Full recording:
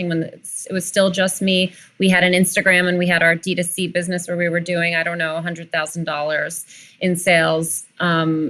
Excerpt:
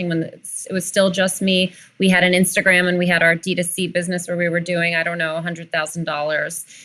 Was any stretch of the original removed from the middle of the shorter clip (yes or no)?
no